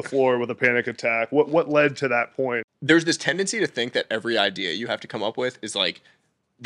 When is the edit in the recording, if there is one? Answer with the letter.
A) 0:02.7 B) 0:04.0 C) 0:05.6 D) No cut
A